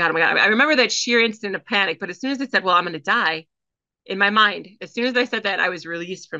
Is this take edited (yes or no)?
no